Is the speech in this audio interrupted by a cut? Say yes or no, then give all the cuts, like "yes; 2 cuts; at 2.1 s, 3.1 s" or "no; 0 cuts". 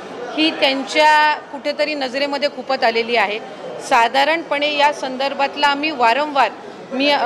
no; 0 cuts